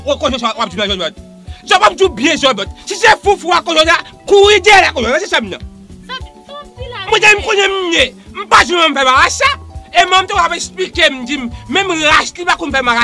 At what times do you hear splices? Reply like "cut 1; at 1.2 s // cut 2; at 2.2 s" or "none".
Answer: none